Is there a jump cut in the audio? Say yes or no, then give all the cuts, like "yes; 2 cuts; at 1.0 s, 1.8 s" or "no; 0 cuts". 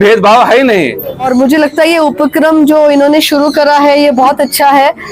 yes; 1 cut; at 1.3 s